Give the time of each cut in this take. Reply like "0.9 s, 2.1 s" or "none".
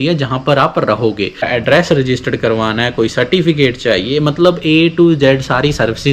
1.5 s